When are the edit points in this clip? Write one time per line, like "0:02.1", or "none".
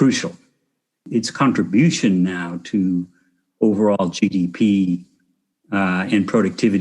0:01.1